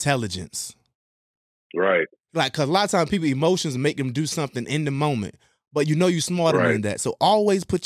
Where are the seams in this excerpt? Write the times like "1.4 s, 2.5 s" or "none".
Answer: 2.2 s